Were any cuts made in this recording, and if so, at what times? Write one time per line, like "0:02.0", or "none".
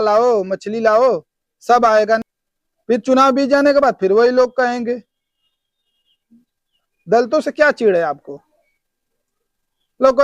0:02.3